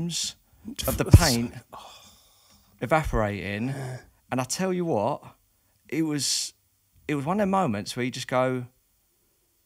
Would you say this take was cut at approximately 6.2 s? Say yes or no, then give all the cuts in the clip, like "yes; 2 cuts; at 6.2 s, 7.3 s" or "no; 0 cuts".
no; 0 cuts